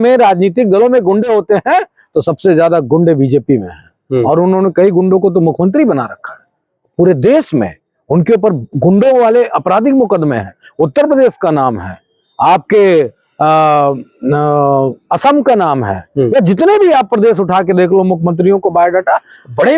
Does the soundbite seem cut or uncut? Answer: uncut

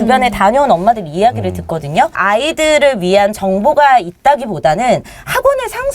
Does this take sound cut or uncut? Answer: cut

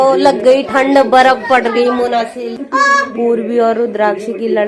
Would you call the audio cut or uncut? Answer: cut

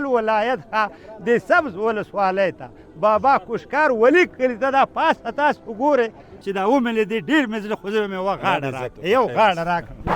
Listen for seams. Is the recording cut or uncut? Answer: cut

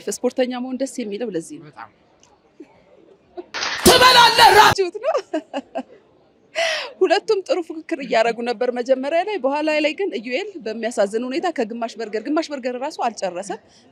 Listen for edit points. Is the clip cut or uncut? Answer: uncut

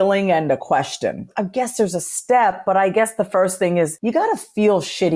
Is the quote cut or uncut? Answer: cut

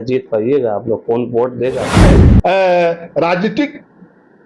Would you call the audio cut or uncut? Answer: cut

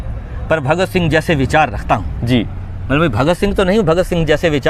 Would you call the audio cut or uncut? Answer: uncut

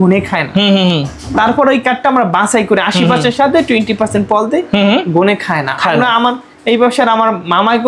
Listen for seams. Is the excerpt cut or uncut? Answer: uncut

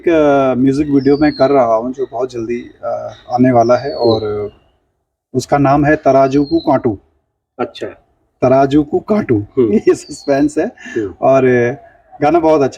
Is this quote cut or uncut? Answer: uncut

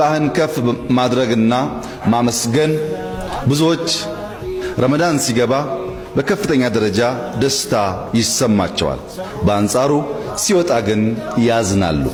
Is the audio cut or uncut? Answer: uncut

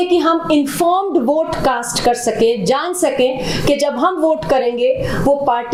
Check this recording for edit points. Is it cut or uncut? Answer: uncut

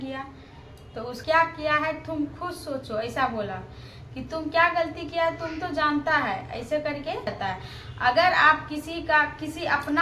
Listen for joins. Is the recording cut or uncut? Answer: cut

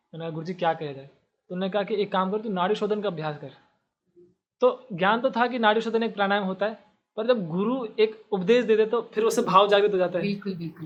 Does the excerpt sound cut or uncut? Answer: uncut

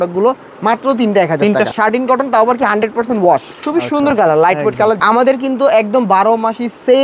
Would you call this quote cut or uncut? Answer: cut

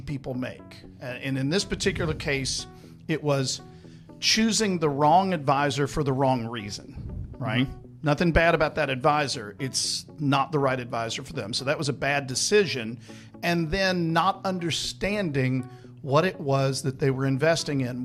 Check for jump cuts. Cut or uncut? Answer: uncut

